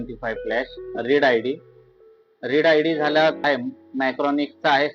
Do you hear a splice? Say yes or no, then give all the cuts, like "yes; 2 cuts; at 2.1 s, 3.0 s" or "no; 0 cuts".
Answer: yes; 1 cut; at 3.4 s